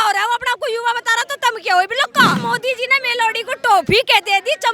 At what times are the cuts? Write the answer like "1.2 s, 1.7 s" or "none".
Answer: 2.4 s